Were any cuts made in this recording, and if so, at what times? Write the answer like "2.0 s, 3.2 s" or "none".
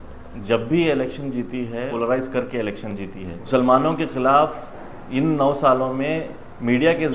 1.9 s, 3.4 s